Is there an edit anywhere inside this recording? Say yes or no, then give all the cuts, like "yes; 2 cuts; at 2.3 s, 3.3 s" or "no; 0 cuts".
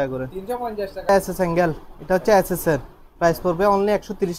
yes; 1 cut; at 1.1 s